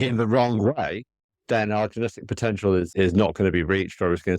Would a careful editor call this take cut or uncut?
cut